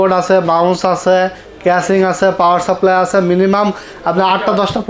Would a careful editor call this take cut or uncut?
uncut